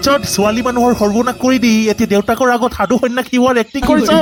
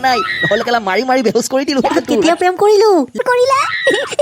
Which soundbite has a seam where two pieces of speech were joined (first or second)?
second